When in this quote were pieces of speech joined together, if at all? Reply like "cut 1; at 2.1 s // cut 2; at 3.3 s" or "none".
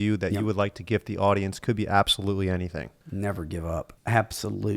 cut 1; at 3.0 s // cut 2; at 3.9 s